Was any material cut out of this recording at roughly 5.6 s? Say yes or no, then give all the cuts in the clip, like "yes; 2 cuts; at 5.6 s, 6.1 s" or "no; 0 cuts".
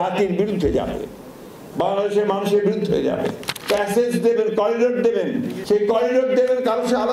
yes; 2 cuts; at 3.5 s, 5.6 s